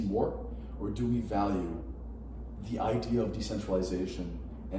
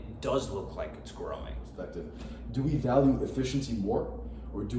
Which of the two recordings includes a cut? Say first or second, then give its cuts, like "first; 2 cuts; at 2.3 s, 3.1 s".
second; 1 cut; at 2.0 s